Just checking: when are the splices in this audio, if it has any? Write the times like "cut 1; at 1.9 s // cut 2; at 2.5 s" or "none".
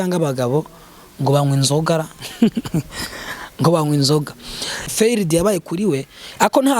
cut 1; at 4.9 s